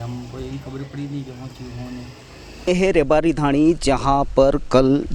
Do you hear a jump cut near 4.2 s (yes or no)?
no